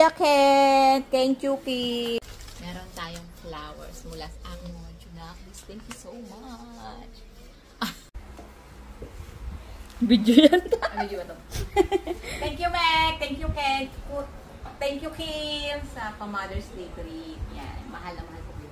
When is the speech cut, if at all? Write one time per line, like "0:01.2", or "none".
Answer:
0:02.3
0:08.2